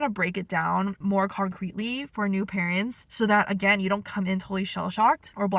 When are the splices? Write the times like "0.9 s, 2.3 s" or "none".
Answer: 1.0 s